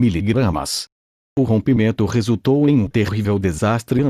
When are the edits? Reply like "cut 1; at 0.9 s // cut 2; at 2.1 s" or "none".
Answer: cut 1; at 1.3 s